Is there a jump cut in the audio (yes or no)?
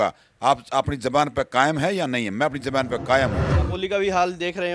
yes